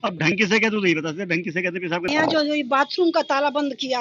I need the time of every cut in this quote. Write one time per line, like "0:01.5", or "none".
0:02.1